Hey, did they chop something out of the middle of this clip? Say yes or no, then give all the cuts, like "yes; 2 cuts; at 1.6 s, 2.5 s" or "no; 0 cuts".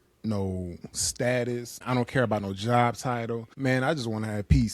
yes; 2 cuts; at 1.8 s, 3.5 s